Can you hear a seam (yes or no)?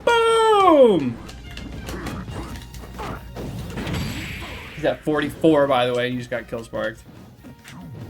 yes